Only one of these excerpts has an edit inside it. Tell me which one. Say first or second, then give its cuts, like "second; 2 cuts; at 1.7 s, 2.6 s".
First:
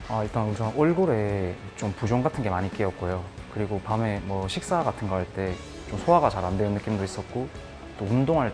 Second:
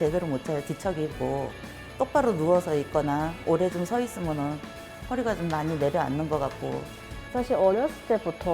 second; 1 cut; at 7.3 s